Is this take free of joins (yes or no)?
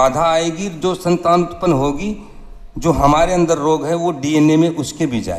yes